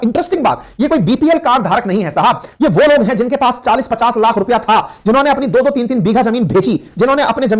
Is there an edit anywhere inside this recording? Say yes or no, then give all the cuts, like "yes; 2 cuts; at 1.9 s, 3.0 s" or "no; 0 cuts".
no; 0 cuts